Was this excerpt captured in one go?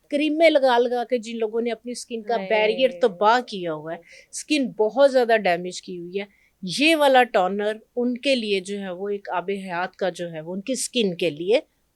yes; 0 cuts

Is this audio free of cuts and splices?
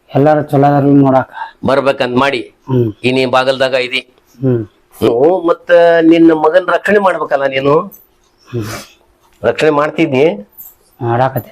no; 1 cut; at 5.1 s

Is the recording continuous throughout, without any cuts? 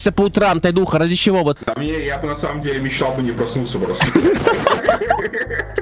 yes; 0 cuts

